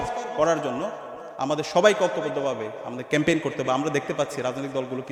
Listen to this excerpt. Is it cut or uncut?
uncut